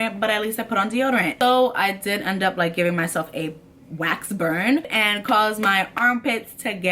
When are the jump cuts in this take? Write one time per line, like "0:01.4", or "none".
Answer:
0:01.4
0:04.9